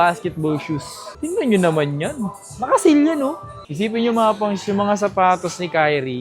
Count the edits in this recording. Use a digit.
1